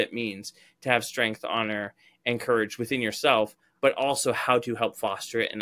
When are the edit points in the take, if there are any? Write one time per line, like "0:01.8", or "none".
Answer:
none